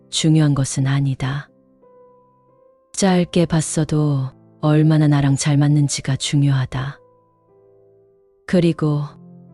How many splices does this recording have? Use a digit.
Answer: 2